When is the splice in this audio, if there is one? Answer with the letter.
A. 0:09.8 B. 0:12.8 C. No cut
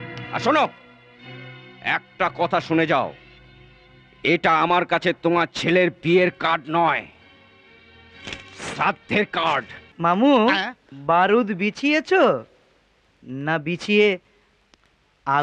A